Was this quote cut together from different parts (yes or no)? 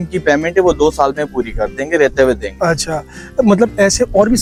no